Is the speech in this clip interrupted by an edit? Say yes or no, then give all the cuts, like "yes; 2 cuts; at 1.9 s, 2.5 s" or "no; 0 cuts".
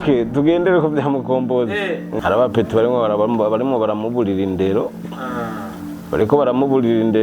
yes; 1 cut; at 2.1 s